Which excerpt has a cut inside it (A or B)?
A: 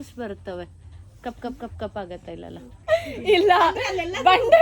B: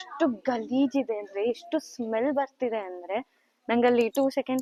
A